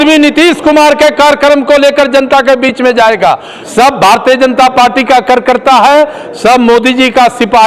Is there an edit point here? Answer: yes; 1 cut; at 3.6 s

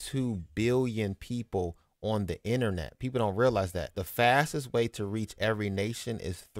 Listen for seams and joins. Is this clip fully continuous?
no; 1 cut; at 4.0 s

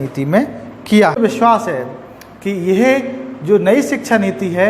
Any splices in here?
yes; 1 cut; at 1.2 s

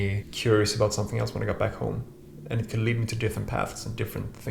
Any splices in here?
no; 0 cuts

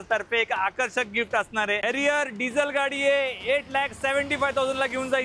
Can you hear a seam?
yes; 1 cut; at 1.8 s

